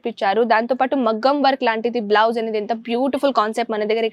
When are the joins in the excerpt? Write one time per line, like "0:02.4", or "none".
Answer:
none